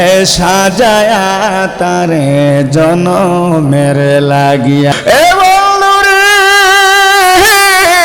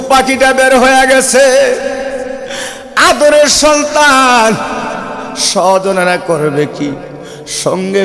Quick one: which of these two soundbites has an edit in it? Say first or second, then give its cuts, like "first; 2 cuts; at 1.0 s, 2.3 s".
first; 1 cut; at 4.9 s